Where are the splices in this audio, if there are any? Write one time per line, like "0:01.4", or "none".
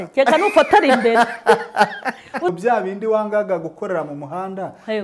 0:02.5